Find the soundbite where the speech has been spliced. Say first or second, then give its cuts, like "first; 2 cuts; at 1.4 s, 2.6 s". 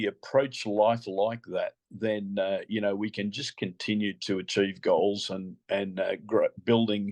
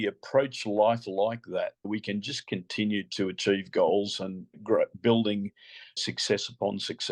second; 3 cuts; at 1.9 s, 4.5 s, 6.0 s